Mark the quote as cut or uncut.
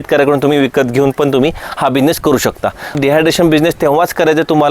cut